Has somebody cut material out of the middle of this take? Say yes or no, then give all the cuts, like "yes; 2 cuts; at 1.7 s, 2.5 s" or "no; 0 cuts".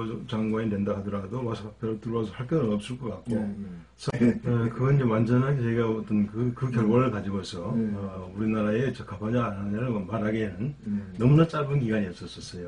yes; 1 cut; at 4.1 s